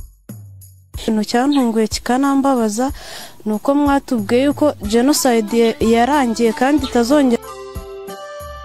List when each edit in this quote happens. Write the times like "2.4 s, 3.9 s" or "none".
1.0 s